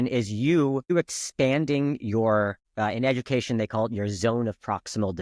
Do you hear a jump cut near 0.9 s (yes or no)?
yes